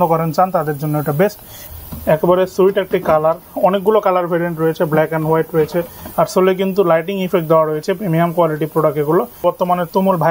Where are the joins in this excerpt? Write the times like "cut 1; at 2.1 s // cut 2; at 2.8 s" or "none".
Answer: cut 1; at 1.6 s // cut 2; at 6.0 s // cut 3; at 9.4 s